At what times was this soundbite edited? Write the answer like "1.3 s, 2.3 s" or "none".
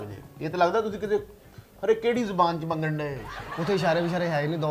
3.5 s